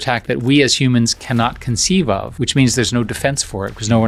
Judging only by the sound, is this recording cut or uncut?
uncut